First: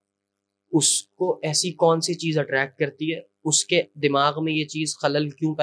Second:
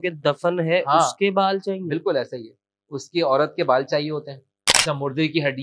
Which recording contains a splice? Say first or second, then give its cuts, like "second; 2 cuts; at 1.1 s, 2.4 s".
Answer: second; 1 cut; at 4.7 s